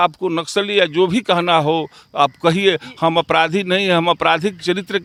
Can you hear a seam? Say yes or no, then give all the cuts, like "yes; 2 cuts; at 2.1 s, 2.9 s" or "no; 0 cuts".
no; 0 cuts